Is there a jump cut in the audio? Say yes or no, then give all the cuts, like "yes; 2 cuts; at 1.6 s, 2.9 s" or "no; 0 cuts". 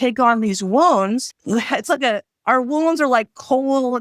yes; 1 cut; at 1.3 s